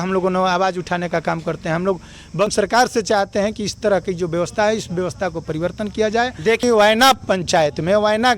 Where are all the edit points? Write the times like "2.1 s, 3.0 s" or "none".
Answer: 2.5 s, 6.6 s